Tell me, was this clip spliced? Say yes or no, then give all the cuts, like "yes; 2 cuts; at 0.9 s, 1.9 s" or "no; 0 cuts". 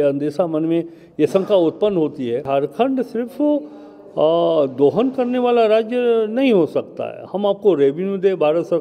yes; 1 cut; at 2.4 s